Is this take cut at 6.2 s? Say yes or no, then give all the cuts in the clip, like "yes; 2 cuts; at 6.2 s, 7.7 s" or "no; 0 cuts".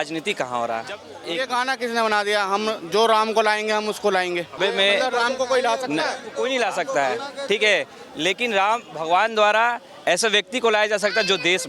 yes; 3 cuts; at 1.2 s, 4.6 s, 6.2 s